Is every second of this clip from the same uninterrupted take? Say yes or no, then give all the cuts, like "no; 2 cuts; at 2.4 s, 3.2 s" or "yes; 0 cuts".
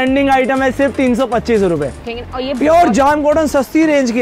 no; 1 cut; at 2.1 s